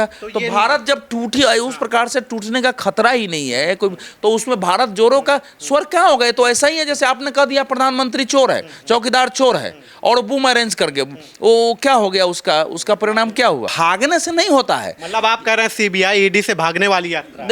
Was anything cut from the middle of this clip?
yes; 1 cut; at 13.7 s

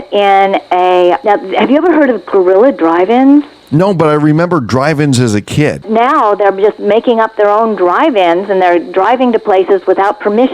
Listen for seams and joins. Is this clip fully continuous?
no; 3 cuts; at 1.2 s, 3.6 s, 5.8 s

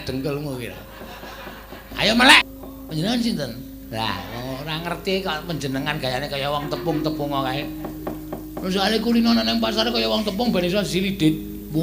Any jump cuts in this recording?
yes; 1 cut; at 2.5 s

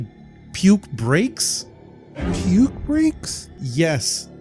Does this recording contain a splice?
no; 0 cuts

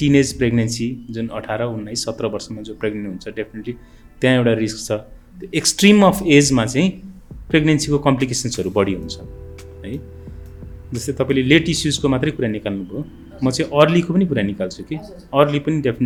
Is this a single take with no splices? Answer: yes; 0 cuts

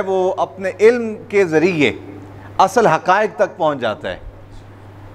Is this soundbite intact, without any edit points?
yes; 0 cuts

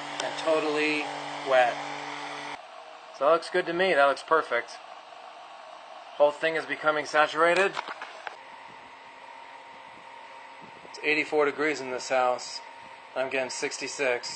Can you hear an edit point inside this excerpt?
yes; 2 cuts; at 2.5 s, 8.4 s

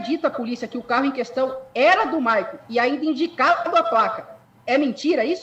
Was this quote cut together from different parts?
no; 0 cuts

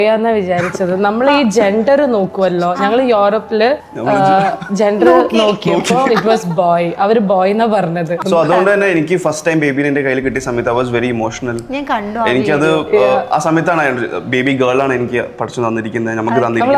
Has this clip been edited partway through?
yes; 2 cuts; at 3.9 s, 8.2 s

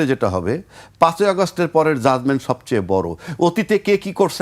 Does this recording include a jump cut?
no; 0 cuts

